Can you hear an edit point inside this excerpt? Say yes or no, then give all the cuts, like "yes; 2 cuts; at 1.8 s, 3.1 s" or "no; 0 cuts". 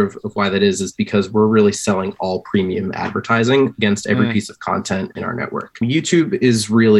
yes; 1 cut; at 5.8 s